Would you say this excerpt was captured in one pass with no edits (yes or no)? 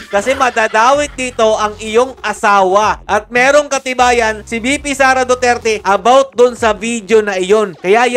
yes